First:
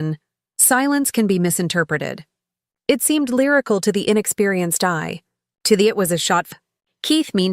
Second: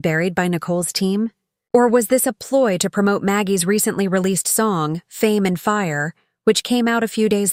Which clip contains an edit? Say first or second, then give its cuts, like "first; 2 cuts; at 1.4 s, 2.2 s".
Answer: first; 1 cut; at 6.5 s